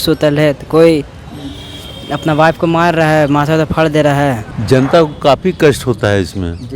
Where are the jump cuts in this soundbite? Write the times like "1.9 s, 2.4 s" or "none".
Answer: 4.5 s